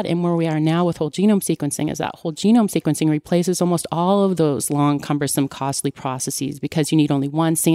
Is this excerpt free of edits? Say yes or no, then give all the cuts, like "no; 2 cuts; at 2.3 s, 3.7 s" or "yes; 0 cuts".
yes; 0 cuts